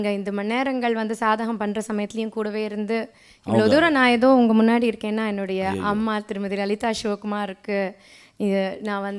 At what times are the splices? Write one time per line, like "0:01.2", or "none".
none